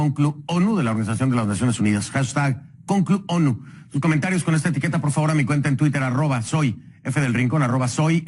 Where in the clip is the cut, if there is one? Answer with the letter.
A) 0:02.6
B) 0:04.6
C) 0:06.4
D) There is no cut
B